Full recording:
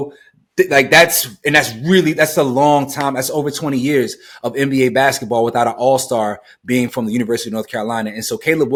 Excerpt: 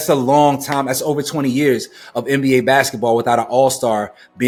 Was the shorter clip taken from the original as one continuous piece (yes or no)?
yes